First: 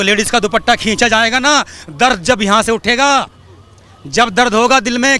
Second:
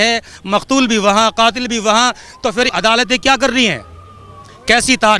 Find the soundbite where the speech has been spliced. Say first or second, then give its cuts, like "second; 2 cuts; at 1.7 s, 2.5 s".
second; 1 cut; at 2.7 s